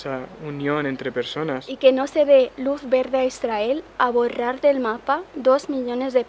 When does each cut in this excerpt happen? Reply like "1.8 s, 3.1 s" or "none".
1.7 s

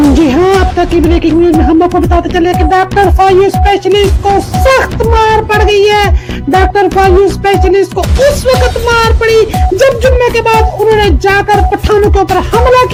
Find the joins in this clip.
none

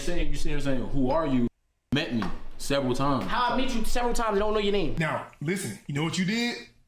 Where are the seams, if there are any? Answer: 4.9 s

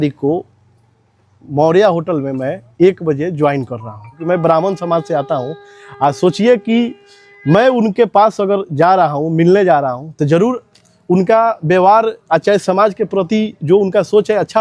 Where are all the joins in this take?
4.2 s

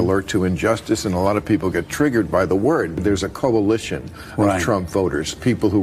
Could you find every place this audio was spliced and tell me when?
2.7 s

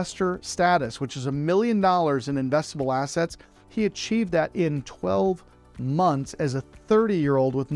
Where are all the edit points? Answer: none

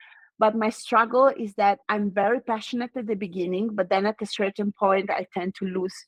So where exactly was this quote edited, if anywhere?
none

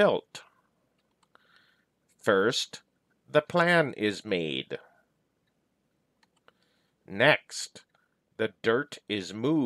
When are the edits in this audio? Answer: 1.1 s, 5.9 s

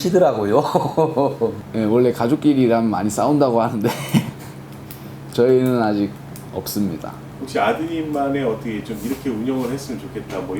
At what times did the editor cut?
1.6 s, 7.3 s

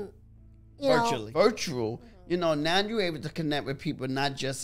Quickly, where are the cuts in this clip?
1.2 s

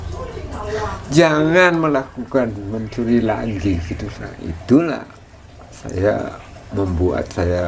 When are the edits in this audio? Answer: 4.4 s

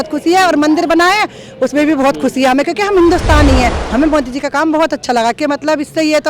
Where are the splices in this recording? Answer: 3.8 s

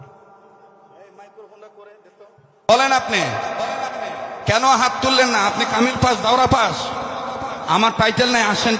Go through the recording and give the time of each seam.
2.7 s

